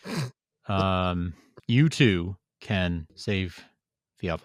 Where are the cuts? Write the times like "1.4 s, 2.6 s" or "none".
1.5 s, 3.1 s